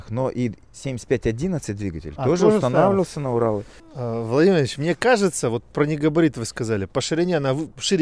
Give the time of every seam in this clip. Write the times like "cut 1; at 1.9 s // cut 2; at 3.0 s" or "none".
cut 1; at 3.8 s